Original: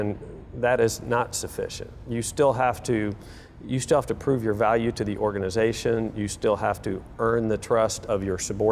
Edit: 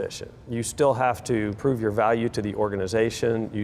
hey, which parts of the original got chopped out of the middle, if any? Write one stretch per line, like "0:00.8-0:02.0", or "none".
0:03.2-0:04.2